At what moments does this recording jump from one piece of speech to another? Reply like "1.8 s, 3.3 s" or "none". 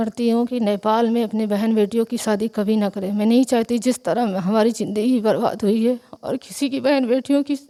none